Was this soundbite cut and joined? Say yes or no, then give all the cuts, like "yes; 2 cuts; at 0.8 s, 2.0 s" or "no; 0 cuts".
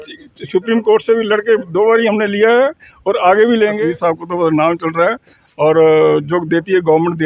yes; 1 cut; at 3.8 s